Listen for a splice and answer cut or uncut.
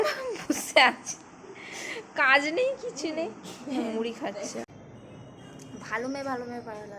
cut